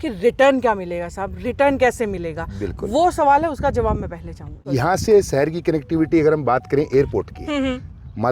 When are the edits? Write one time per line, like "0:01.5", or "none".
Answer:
0:04.6

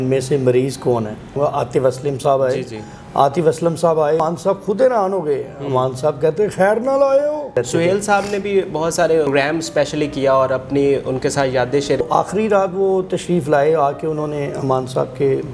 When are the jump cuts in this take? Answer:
0:01.4
0:04.2
0:07.6
0:09.3
0:12.0

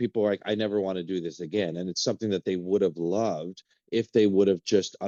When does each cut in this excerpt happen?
none

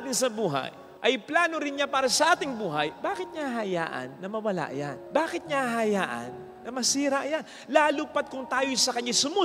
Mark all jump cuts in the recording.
none

